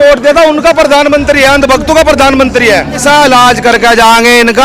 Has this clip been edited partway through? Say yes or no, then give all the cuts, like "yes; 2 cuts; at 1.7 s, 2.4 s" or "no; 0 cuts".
yes; 1 cut; at 3.0 s